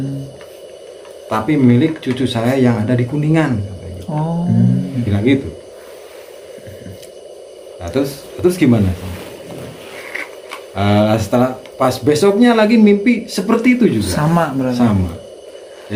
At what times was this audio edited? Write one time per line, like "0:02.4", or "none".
none

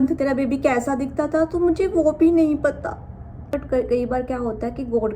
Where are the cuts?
0:03.5

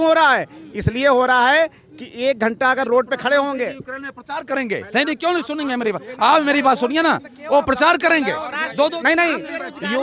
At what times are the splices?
none

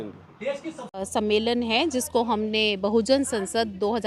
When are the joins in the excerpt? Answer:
0:01.0

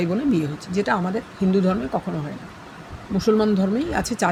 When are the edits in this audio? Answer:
none

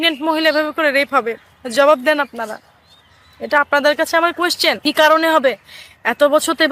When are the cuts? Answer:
0:04.8

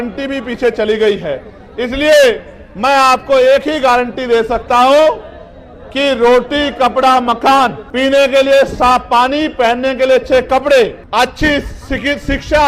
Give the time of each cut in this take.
0:07.8
0:11.0

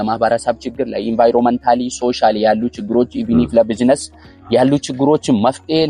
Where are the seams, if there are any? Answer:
none

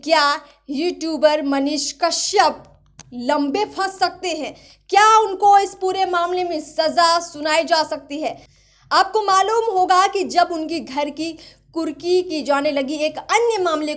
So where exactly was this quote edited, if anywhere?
none

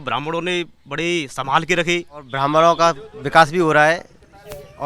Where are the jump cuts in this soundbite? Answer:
0:02.3

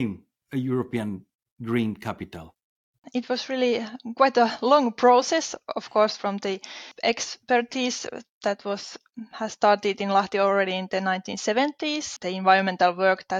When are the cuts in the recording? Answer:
0:03.0
0:06.9
0:12.1

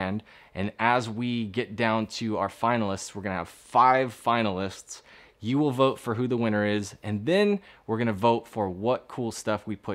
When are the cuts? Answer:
none

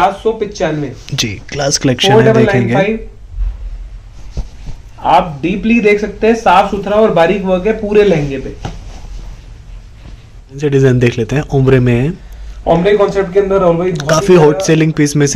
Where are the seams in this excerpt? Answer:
0:10.6

